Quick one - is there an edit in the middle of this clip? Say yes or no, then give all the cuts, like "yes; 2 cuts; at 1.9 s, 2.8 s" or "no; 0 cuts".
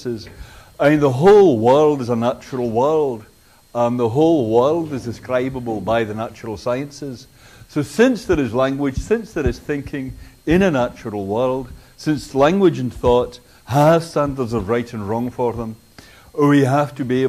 no; 0 cuts